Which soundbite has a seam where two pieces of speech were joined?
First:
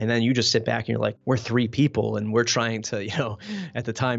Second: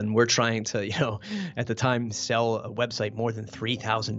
first; 1 cut; at 1.2 s

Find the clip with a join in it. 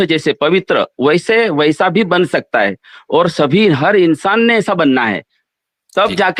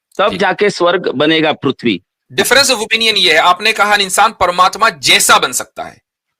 second; 1 cut; at 2.2 s

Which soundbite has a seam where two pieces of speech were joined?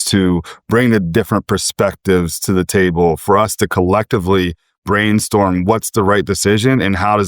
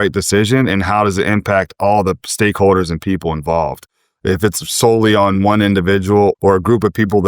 second; 1 cut; at 6.4 s

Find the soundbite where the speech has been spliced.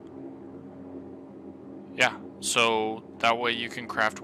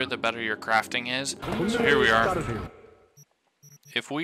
second; 1 cut; at 1.4 s

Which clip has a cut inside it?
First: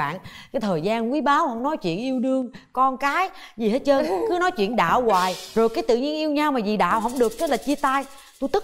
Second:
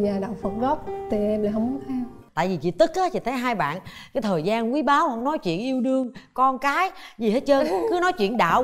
second; 1 cut; at 2.2 s

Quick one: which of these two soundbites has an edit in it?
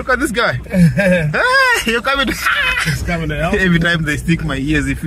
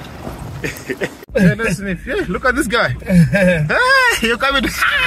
second; 1 cut; at 1.3 s

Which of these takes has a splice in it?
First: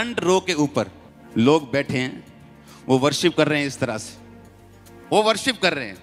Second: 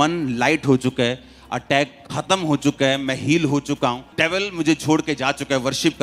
second; 1 cut; at 4.1 s

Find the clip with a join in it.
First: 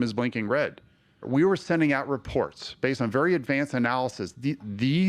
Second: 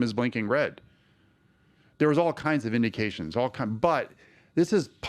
first; 1 cut; at 1.2 s

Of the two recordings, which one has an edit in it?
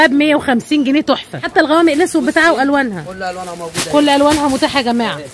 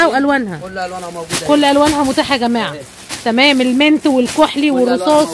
first; 1 cut; at 1.4 s

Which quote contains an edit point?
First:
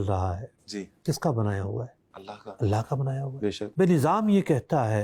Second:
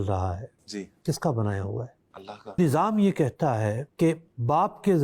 second; 1 cut; at 2.6 s

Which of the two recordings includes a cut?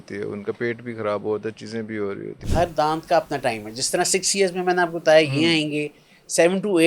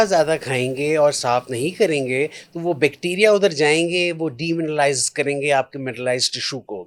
first; 1 cut; at 2.3 s

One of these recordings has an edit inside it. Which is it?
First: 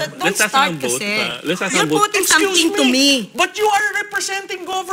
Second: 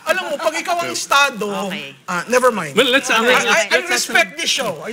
second; 1 cut; at 3.7 s

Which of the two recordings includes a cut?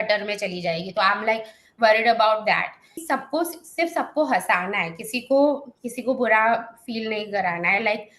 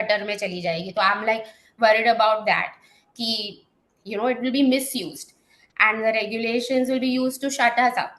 first; 1 cut; at 3.0 s

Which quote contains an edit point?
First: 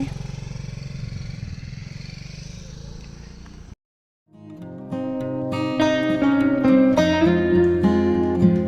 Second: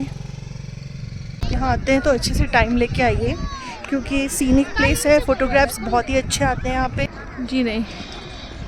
second; 2 cuts; at 1.5 s, 7.1 s

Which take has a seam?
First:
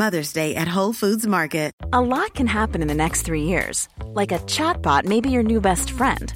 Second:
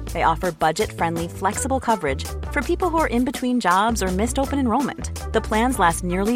first; 1 cut; at 1.8 s

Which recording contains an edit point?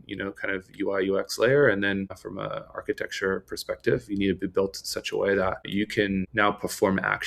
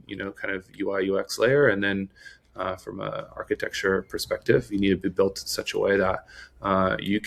first; 2 cuts; at 2.2 s, 5.9 s

